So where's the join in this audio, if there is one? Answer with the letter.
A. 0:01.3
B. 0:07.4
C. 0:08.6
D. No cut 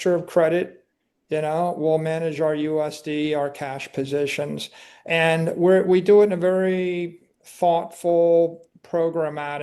D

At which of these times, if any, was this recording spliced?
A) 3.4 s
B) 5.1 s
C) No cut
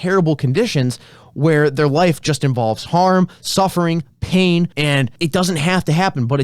B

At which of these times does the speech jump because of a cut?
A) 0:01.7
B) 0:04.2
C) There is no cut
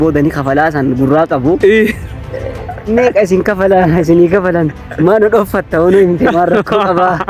C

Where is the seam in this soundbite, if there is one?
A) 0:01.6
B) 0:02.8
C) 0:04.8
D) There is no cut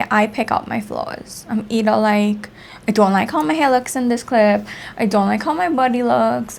D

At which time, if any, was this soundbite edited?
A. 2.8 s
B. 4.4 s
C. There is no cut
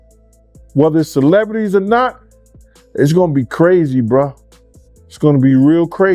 C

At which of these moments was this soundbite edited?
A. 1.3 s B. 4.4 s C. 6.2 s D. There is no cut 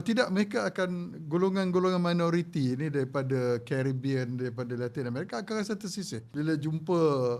C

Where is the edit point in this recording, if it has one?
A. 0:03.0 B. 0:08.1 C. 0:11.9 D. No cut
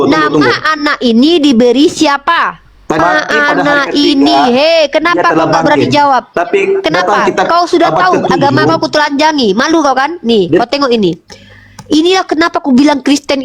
A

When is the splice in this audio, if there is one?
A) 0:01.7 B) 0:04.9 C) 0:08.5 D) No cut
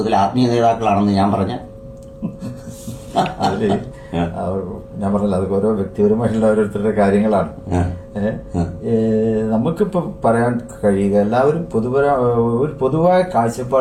D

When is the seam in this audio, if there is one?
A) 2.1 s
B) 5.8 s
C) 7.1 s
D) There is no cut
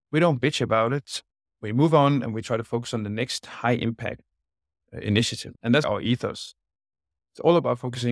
B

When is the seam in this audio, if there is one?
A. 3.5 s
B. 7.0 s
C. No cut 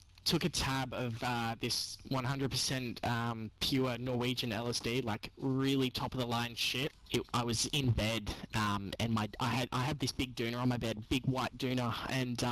B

